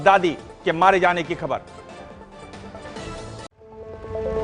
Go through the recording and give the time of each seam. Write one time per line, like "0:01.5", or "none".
0:03.5